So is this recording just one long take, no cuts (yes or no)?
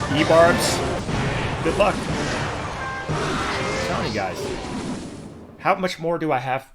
no